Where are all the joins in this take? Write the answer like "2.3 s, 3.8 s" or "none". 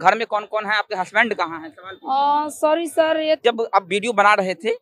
3.4 s